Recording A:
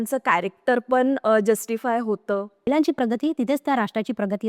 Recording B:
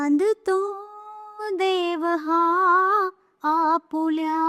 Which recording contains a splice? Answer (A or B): A